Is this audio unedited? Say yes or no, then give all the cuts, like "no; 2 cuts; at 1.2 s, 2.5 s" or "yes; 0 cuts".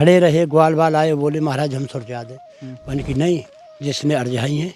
yes; 0 cuts